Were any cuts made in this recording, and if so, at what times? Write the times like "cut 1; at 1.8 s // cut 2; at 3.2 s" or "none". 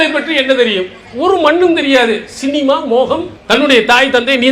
cut 1; at 3.3 s